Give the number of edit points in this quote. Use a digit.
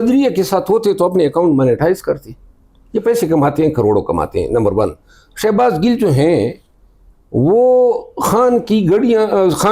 0